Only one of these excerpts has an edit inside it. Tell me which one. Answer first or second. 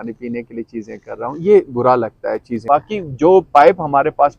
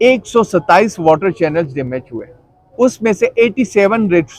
first